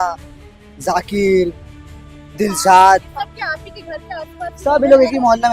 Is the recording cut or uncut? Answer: uncut